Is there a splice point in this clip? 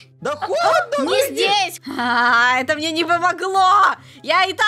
yes; 1 cut; at 1.8 s

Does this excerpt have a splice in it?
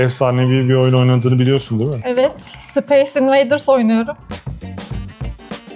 no; 0 cuts

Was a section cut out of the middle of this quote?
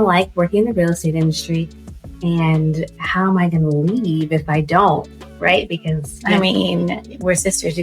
no; 0 cuts

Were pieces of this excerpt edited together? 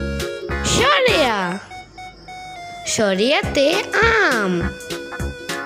yes; 4 cuts; at 0.7 s, 1.6 s, 2.9 s, 4.6 s

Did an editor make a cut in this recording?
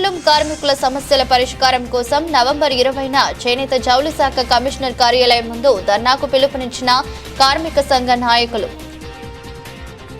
yes; 1 cut; at 8.7 s

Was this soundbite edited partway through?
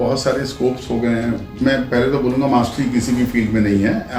yes; 1 cut; at 1.6 s

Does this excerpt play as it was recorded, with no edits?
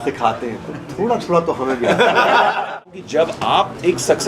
no; 1 cut; at 2.8 s

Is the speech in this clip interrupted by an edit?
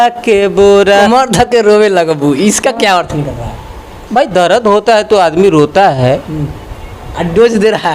yes; 1 cut; at 1.1 s

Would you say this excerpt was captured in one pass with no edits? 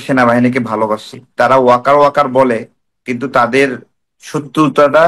no; 1 cut; at 1.3 s

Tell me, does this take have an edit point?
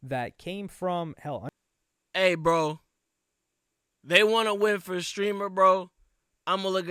no; 0 cuts

